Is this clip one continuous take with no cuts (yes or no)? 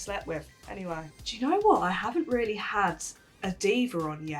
no